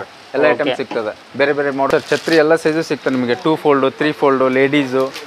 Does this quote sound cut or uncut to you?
cut